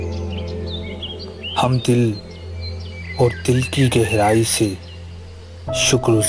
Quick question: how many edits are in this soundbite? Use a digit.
1